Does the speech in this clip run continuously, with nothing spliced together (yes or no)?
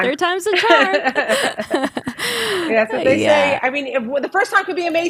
yes